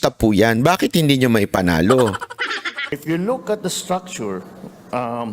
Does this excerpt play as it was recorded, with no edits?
no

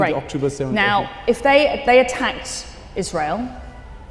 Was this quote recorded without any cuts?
yes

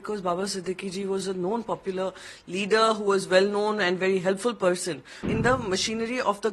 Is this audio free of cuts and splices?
no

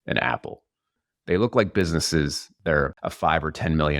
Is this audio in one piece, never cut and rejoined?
no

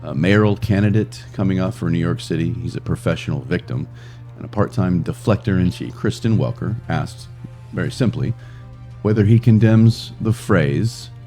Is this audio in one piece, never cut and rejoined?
no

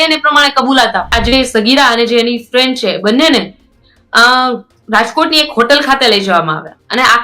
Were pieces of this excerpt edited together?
yes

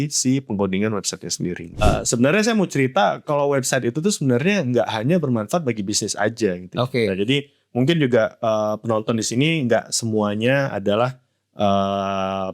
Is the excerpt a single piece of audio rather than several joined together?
no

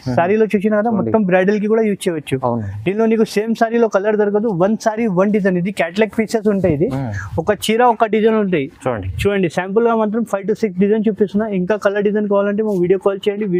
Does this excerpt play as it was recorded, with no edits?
yes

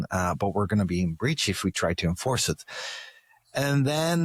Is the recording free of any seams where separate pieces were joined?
yes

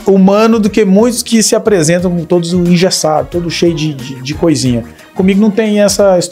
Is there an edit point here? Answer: no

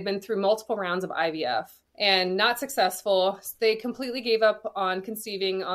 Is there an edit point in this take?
yes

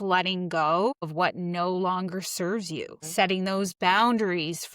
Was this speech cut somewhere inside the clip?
yes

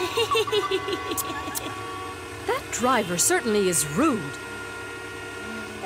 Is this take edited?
yes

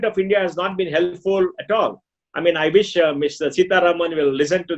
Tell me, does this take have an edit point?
yes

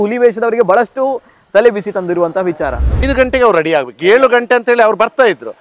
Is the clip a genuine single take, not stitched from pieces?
no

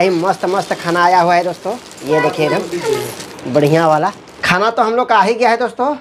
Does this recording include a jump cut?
no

